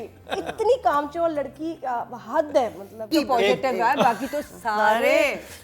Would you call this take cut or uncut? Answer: cut